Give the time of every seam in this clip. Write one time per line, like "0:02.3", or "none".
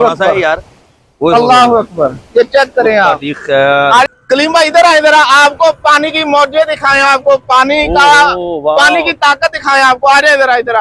0:04.1